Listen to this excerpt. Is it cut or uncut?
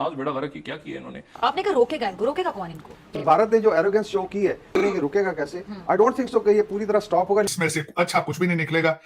cut